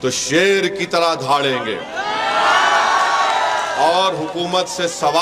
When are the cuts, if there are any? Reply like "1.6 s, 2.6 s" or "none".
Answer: none

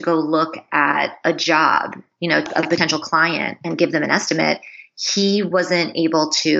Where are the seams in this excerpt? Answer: 2.5 s

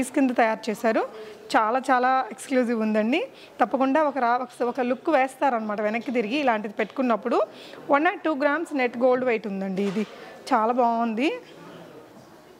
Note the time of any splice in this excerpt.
none

